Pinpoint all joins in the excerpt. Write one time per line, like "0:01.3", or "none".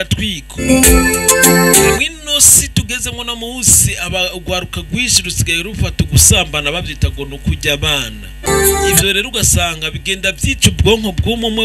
0:08.5